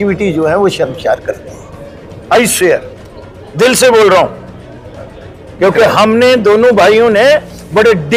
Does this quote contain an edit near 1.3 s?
no; 0 cuts

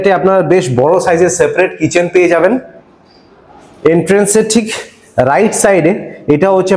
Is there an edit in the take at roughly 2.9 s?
no; 0 cuts

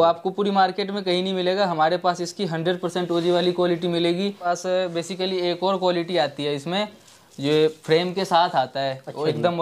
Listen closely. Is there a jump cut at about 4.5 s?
yes; 1 cut; at 4.5 s

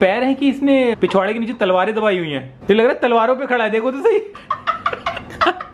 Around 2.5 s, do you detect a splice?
no; 2 cuts; at 0.9 s, 4.3 s

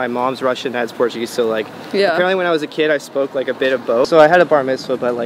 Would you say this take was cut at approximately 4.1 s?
yes; 1 cut; at 4.1 s

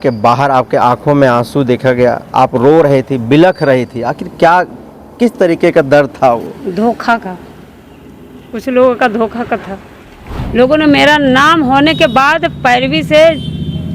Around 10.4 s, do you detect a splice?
yes; 1 cut; at 10.4 s

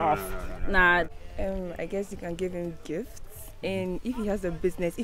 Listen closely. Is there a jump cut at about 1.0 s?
yes; 1 cut; at 1.0 s

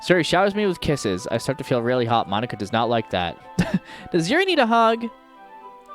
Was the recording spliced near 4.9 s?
no; 1 cut; at 3.5 s

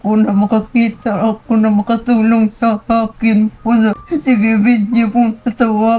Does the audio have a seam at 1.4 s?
no; 1 cut; at 4.0 s

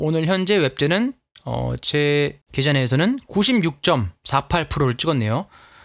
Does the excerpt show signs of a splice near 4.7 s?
no; 1 cut; at 2.4 s

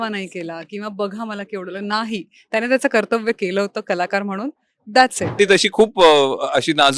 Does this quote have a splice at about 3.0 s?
no; 1 cut; at 5.3 s

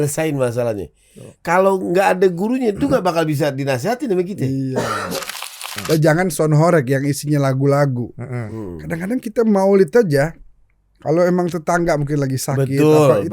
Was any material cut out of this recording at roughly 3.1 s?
no; 1 cut; at 5.3 s

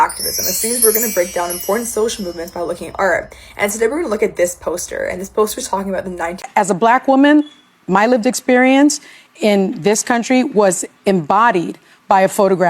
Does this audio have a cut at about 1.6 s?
no; 1 cut; at 6.4 s

